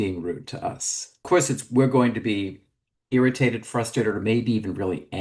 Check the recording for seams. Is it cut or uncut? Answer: cut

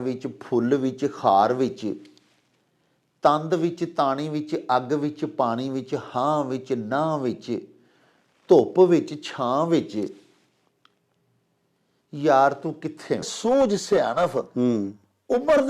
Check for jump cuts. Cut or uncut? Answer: cut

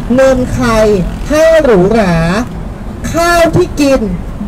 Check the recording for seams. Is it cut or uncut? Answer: uncut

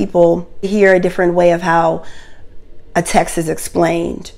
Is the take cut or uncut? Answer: uncut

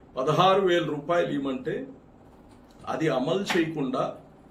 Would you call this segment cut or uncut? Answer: uncut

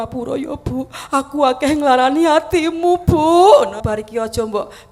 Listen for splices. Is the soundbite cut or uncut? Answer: cut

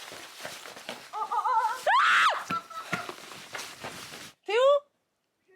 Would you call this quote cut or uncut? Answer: cut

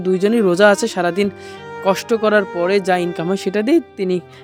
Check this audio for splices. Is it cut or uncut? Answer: uncut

